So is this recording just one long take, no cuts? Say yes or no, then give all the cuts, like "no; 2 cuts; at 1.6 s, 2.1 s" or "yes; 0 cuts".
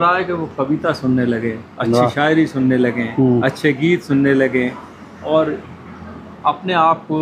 yes; 0 cuts